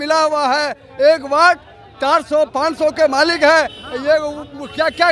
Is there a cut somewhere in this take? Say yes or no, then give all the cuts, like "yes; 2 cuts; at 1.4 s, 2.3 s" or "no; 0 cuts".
no; 0 cuts